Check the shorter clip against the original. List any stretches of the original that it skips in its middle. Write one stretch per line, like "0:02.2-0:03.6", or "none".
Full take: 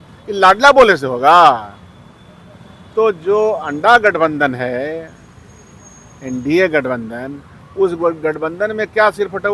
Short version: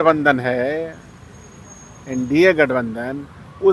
none